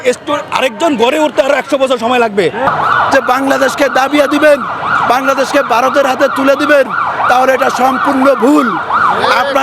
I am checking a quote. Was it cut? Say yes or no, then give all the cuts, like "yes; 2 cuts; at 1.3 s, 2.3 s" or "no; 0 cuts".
yes; 1 cut; at 2.6 s